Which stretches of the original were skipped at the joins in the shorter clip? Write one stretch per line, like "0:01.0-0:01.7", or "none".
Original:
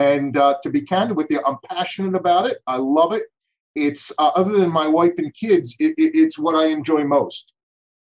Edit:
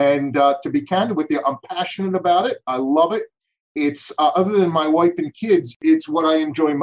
0:05.8-0:06.1